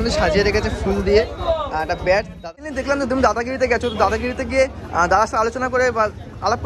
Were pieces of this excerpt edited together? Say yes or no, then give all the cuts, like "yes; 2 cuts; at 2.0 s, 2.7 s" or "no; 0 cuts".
yes; 1 cut; at 2.7 s